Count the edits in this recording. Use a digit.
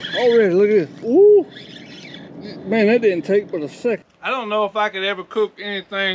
1